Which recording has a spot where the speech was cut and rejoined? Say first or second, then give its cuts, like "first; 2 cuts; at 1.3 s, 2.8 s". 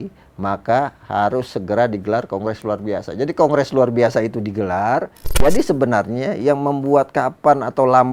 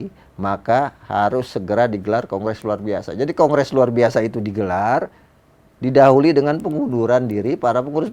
first; 1 cut; at 5.2 s